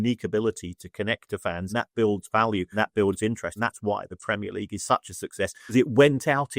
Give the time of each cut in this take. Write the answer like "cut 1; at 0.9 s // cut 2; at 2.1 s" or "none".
cut 1; at 1.7 s // cut 2; at 2.7 s // cut 3; at 3.5 s // cut 4; at 5.7 s